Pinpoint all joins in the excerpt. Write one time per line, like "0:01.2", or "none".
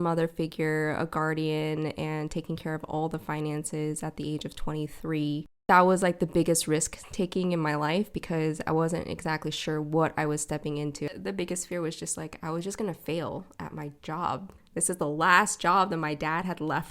0:05.6
0:11.1
0:14.5